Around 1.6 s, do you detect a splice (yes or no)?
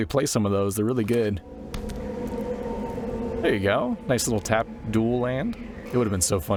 no